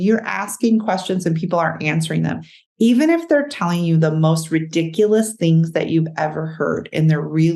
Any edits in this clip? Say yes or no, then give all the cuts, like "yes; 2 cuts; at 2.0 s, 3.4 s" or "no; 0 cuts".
no; 0 cuts